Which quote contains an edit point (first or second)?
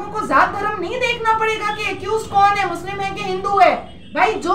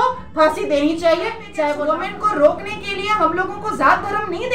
second